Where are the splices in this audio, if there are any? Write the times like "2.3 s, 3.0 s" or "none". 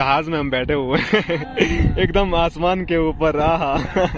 none